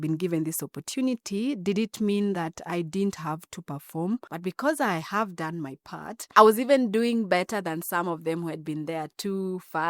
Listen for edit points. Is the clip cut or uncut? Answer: cut